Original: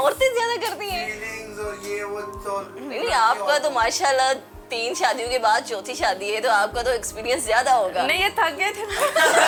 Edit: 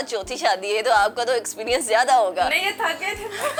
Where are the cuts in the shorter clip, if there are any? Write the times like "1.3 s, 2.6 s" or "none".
none